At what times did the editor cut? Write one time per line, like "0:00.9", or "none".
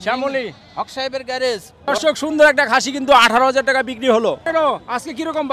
0:01.9
0:04.4